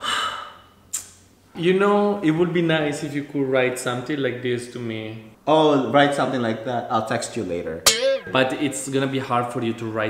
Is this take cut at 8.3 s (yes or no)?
yes